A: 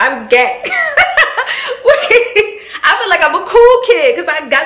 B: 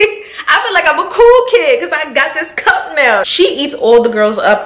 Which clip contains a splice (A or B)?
B